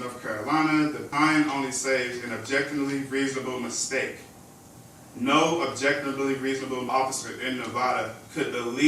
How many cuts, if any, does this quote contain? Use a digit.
2